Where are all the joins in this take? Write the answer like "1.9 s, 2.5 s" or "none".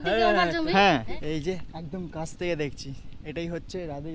1.2 s